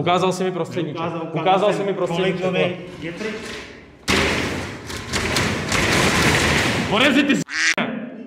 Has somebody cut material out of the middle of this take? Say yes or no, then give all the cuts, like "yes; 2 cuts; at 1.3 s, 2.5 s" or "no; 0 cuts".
no; 0 cuts